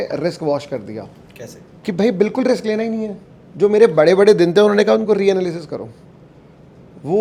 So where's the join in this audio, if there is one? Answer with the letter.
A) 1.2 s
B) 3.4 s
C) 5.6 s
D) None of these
D